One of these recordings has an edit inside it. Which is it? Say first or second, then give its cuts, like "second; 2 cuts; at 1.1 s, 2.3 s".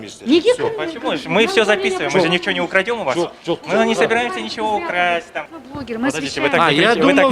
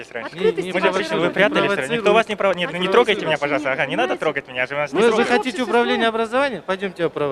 first; 1 cut; at 5.3 s